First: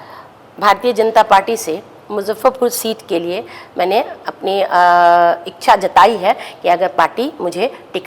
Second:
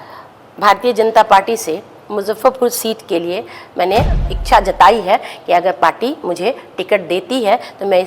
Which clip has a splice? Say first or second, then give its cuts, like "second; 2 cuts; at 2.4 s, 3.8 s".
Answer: second; 1 cut; at 4.3 s